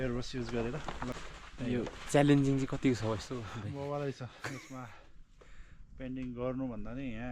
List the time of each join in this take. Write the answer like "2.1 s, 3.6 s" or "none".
1.1 s